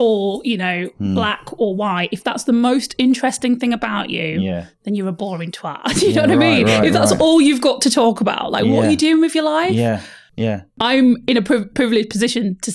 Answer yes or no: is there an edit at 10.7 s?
yes